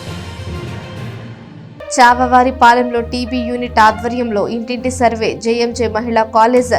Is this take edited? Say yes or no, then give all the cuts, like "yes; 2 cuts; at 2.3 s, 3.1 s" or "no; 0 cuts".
yes; 1 cut; at 1.7 s